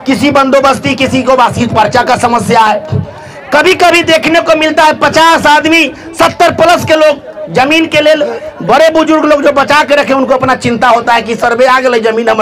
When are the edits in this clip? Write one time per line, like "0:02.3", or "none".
none